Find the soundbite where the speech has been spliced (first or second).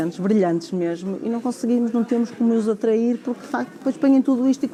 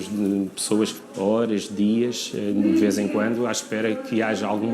second